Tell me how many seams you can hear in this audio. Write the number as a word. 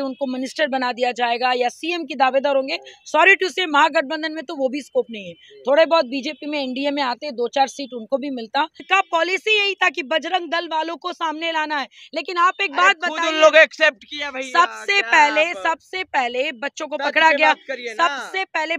one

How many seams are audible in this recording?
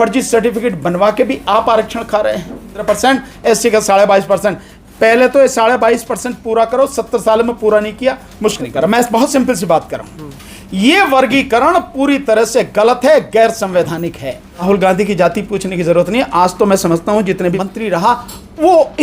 four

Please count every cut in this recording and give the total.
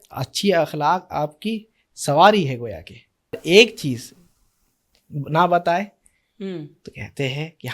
one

